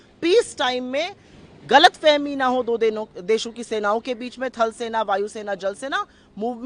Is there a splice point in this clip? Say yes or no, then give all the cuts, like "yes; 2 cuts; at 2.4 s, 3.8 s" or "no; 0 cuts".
no; 0 cuts